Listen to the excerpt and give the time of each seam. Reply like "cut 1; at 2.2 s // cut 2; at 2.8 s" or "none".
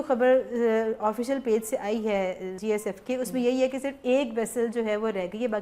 cut 1; at 2.5 s